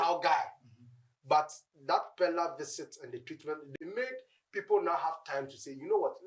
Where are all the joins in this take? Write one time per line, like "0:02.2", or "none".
0:03.7